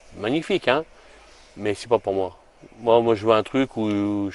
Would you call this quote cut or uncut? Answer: uncut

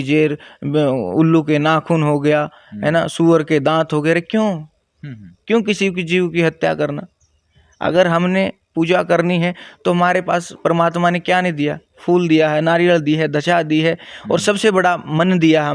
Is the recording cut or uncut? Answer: uncut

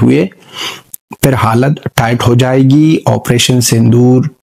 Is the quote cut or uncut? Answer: uncut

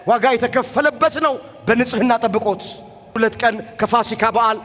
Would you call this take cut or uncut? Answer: cut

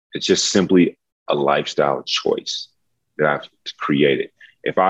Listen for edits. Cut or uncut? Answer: uncut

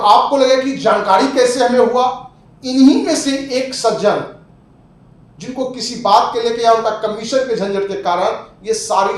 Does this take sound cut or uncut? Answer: uncut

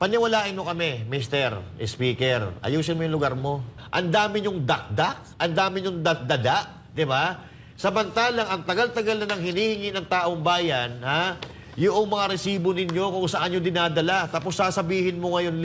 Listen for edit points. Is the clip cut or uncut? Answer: cut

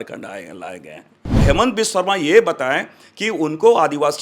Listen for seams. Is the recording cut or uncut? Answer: cut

